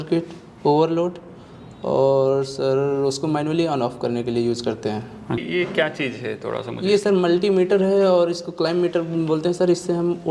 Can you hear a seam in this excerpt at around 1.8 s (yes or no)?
no